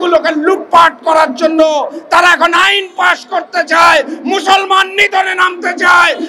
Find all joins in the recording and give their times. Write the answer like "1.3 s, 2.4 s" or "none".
none